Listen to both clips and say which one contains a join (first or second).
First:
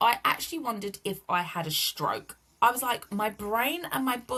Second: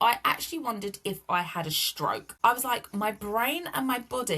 second